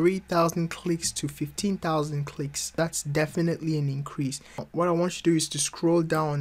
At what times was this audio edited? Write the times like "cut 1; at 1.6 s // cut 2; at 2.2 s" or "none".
cut 1; at 2.8 s // cut 2; at 4.7 s